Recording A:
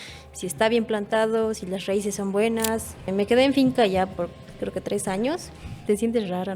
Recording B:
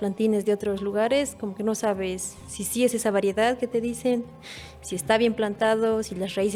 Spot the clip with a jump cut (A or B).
A